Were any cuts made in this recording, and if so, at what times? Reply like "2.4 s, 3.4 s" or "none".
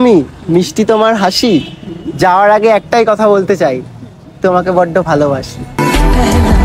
5.8 s